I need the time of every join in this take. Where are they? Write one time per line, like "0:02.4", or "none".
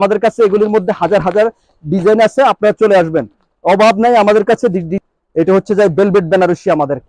0:04.9